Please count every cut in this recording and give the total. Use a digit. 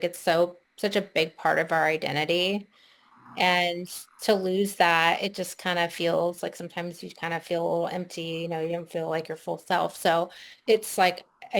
1